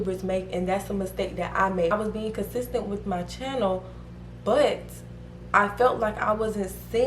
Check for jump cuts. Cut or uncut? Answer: cut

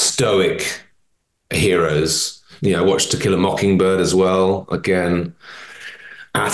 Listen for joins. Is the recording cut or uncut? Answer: cut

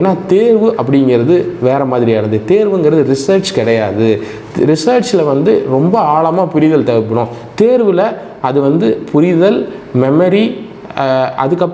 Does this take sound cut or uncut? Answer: uncut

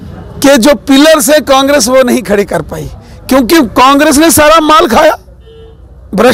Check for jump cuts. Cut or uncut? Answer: uncut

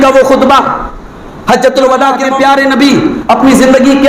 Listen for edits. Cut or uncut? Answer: cut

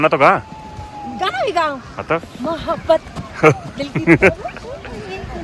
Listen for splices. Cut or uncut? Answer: uncut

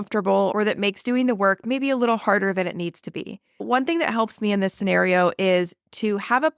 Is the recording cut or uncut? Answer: cut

